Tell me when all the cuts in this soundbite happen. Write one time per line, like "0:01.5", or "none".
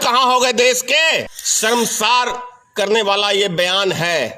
0:01.4